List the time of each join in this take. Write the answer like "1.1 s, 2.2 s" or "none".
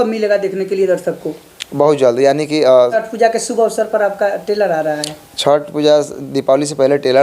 2.9 s